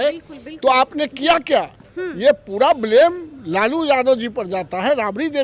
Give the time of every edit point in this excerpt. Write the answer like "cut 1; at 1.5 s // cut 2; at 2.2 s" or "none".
none